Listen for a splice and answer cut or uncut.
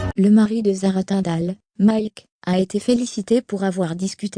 cut